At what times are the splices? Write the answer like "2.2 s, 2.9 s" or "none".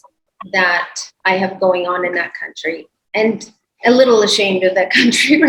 none